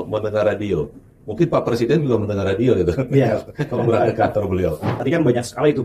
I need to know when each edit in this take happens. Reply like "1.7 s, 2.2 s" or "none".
4.9 s